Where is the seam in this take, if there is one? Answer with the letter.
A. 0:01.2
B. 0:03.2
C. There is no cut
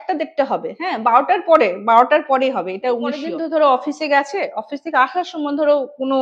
B